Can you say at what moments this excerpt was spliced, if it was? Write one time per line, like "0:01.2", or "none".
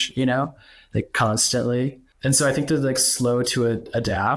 0:02.1

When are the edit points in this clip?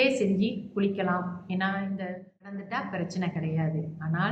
0:02.6

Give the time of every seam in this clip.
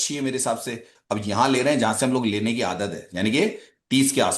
0:00.9

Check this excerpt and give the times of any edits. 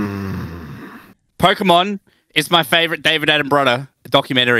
0:01.2

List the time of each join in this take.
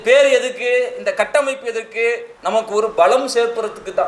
0:02.3

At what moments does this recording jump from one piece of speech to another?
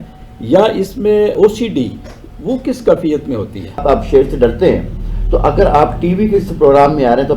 0:03.6

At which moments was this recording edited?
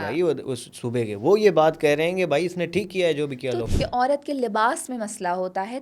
0:03.6

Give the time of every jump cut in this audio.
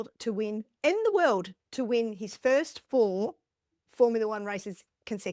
none

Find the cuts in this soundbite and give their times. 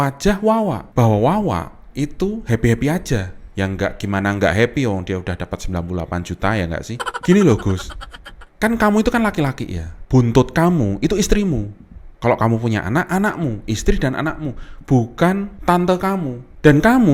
none

